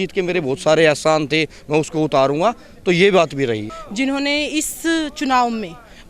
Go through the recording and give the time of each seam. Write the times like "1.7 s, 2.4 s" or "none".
3.7 s